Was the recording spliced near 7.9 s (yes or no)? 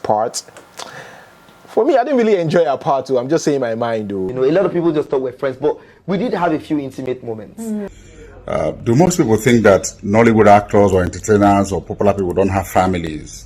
yes